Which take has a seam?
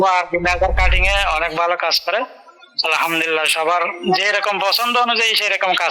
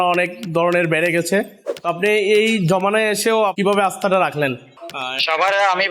second; 2 cuts; at 3.6 s, 4.8 s

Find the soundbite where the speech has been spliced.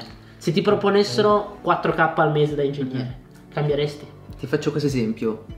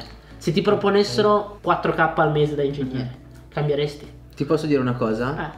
first; 1 cut; at 4.2 s

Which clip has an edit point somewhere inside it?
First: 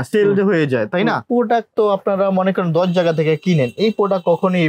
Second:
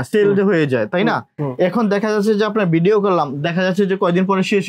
first; 1 cut; at 1.2 s

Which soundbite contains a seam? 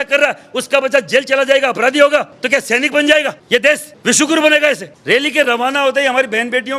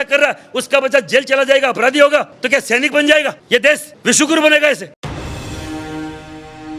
first; 1 cut; at 5.0 s

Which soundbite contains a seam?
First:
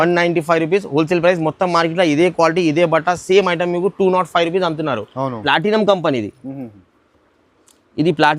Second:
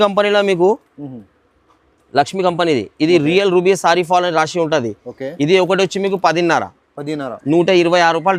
first; 1 cut; at 5.4 s

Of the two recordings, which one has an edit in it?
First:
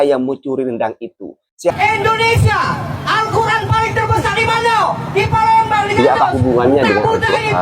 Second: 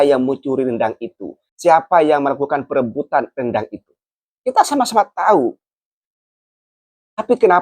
first; 1 cut; at 1.7 s

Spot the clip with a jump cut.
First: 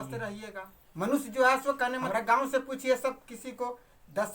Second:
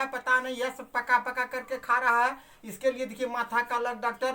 first; 1 cut; at 2.0 s

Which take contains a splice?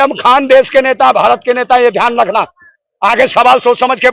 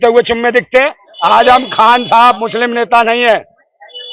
second; 1 cut; at 1.1 s

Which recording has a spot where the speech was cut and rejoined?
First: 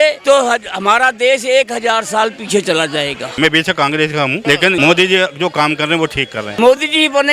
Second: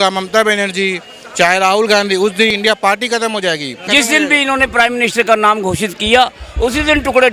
first; 3 cuts; at 3.3 s, 4.6 s, 6.4 s

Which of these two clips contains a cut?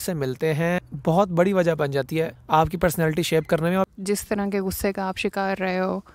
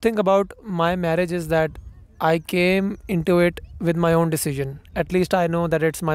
first; 3 cuts; at 0.9 s, 2.4 s, 3.9 s

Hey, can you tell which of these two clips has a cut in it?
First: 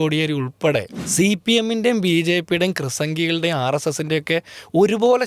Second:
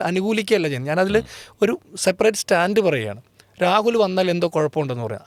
first; 1 cut; at 1.0 s

